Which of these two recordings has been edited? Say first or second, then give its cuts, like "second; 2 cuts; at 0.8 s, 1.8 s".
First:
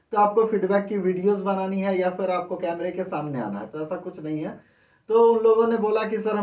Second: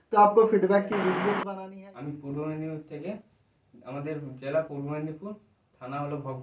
second; 1 cut; at 1.5 s